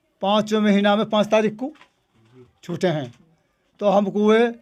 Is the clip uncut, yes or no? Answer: yes